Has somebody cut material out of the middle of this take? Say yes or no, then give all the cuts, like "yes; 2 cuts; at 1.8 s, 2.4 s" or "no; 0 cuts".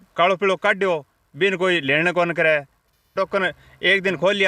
yes; 1 cut; at 3.1 s